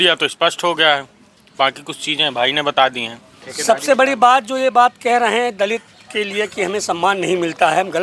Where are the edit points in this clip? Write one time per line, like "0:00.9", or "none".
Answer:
none

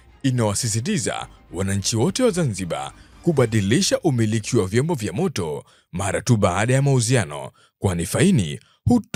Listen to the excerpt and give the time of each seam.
none

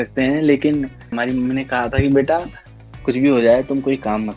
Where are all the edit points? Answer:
0:01.1

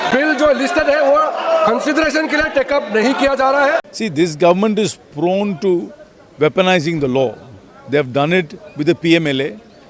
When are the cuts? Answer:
0:03.9

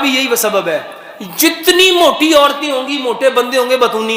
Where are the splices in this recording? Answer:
none

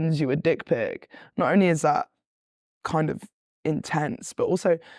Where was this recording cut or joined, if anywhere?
none

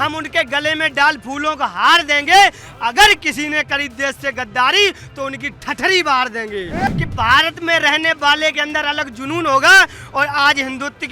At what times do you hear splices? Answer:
0:06.9

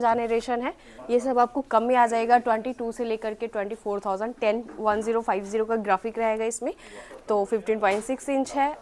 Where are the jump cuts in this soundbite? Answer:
none

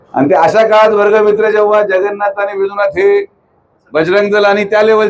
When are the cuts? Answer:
0:03.7

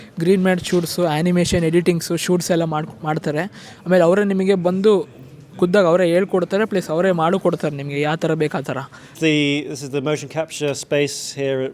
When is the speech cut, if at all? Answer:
0:09.2

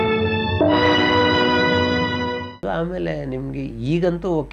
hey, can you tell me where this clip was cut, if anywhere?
none

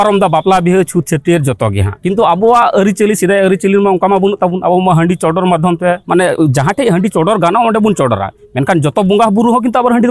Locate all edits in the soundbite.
none

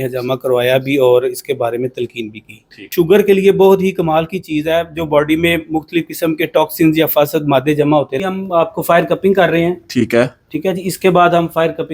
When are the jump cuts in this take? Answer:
0:02.9
0:08.1

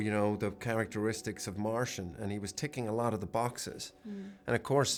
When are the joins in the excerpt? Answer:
none

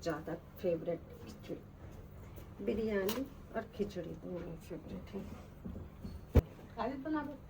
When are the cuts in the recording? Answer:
0:06.4

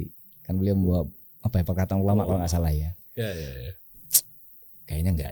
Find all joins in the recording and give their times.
0:04.0

